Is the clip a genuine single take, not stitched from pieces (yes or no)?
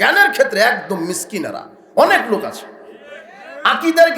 yes